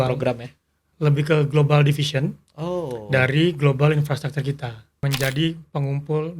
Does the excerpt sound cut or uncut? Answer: cut